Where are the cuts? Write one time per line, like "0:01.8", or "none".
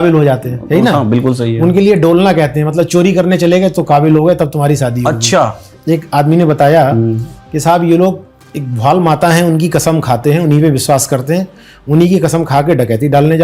0:05.7

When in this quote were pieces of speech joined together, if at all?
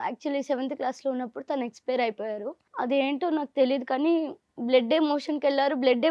0:02.6

